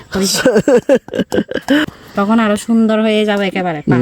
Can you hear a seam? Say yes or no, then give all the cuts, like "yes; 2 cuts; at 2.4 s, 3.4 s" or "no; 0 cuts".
yes; 1 cut; at 1.9 s